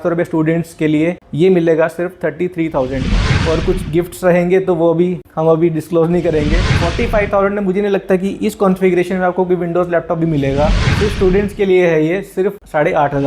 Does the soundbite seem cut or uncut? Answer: cut